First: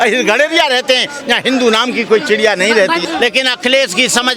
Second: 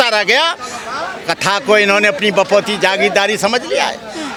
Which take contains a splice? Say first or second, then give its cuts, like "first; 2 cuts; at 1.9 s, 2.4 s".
first; 1 cut; at 3.0 s